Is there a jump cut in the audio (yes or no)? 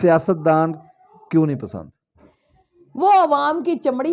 no